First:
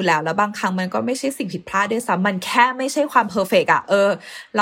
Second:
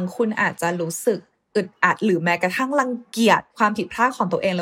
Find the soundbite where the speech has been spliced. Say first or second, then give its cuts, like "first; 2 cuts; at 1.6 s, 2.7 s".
second; 2 cuts; at 1.3 s, 3.5 s